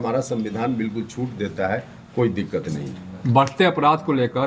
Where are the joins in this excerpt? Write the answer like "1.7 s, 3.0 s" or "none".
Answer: none